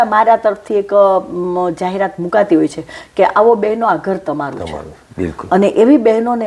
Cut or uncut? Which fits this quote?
uncut